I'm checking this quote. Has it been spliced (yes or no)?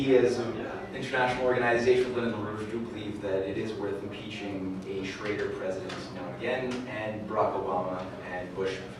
yes